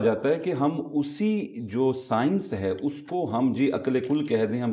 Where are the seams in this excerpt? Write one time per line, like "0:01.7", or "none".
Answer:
none